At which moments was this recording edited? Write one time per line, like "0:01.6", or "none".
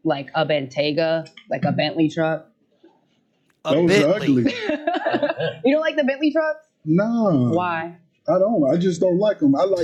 none